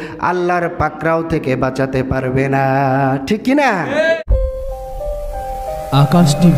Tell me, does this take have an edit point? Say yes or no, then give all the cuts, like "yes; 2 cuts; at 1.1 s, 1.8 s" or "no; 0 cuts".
yes; 1 cut; at 4.2 s